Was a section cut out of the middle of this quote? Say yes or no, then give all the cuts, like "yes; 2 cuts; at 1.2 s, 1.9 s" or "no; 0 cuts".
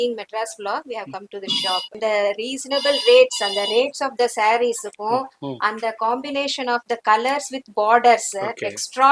yes; 1 cut; at 1.9 s